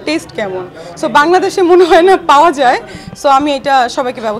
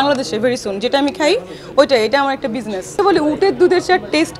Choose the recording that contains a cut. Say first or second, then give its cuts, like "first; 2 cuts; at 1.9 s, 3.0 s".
second; 1 cut; at 3.0 s